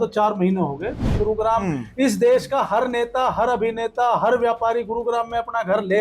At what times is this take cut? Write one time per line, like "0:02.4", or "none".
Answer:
0:01.2